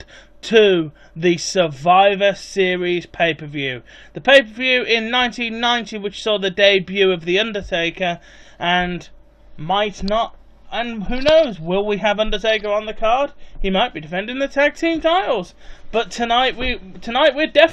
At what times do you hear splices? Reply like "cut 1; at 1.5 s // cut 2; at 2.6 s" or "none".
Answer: none